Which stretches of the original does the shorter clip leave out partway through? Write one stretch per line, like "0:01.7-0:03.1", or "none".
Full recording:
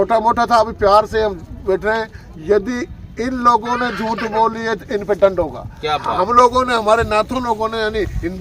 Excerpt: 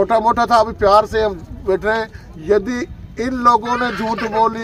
none